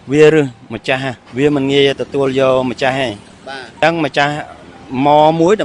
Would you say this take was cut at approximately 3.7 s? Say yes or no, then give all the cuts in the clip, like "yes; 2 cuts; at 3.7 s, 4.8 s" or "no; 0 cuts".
yes; 2 cuts; at 1.2 s, 3.7 s